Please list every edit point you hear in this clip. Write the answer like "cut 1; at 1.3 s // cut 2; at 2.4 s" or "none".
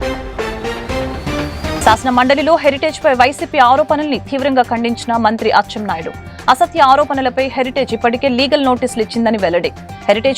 cut 1; at 1.8 s